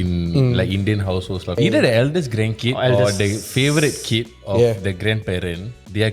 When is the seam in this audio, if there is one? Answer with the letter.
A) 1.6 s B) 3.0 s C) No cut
A